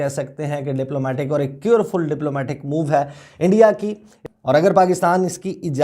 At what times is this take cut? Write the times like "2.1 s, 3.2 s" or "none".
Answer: 4.2 s

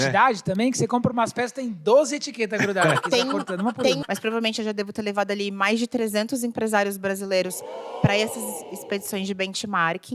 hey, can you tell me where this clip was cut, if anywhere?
4.0 s

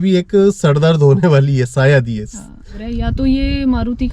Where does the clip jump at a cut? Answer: 2.8 s

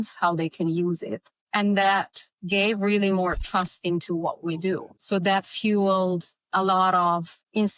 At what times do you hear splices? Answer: none

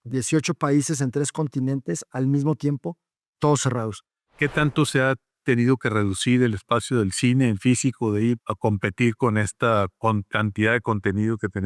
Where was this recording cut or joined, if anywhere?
4.3 s, 8.5 s

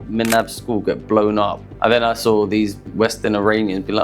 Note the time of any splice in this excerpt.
1.6 s, 2.9 s

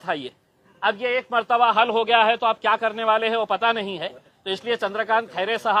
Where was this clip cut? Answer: none

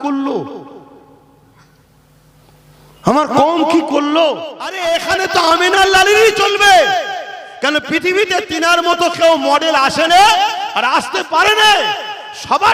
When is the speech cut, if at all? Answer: 4.8 s

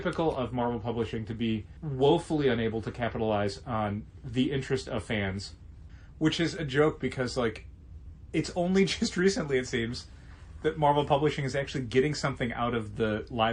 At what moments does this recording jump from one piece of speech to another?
none

